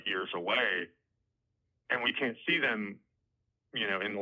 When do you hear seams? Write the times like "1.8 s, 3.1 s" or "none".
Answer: none